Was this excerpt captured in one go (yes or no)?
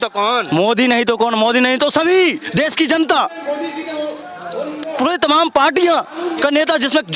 yes